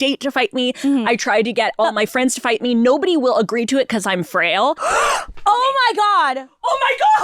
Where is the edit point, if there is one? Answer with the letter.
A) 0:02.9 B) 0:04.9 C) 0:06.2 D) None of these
B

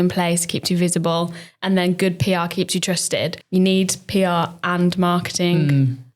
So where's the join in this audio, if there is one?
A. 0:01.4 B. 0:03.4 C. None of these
C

